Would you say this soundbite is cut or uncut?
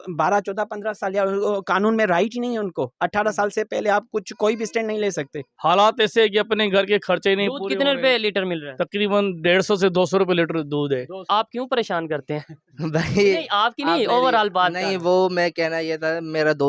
cut